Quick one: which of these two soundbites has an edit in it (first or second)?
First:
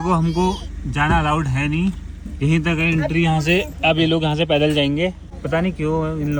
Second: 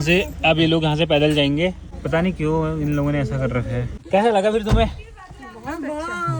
second